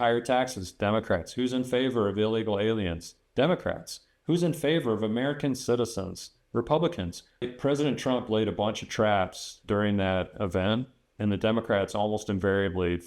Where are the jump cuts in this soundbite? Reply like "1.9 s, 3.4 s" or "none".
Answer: 7.4 s